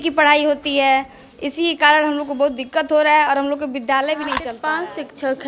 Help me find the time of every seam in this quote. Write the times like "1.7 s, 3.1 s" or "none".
4.5 s